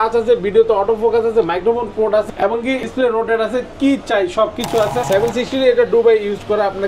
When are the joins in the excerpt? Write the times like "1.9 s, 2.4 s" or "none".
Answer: 2.8 s, 5.1 s

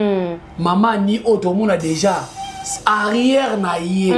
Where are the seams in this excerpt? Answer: none

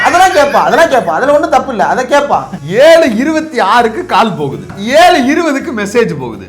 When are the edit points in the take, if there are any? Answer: 2.6 s, 4.6 s

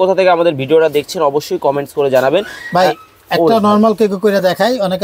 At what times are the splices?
none

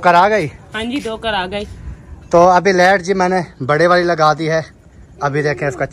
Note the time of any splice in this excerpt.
none

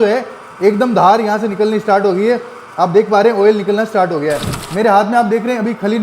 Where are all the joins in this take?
4.6 s

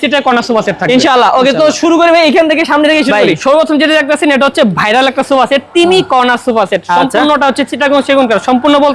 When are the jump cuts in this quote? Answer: none

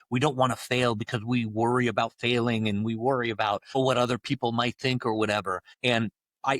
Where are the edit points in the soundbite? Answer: 3.8 s, 5.7 s

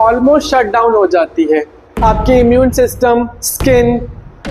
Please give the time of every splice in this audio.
1.9 s

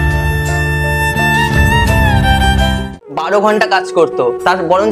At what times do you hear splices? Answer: 3.1 s

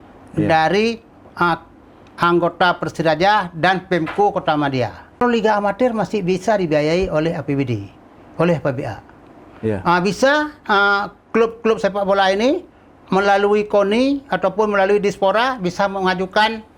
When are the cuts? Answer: 5.2 s

